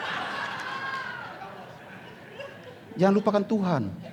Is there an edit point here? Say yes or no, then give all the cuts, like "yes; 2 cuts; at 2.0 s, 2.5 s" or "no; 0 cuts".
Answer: no; 0 cuts